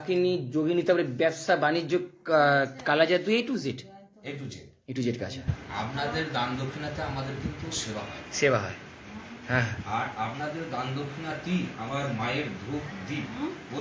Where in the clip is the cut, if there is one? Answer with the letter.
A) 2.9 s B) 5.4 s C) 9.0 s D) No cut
B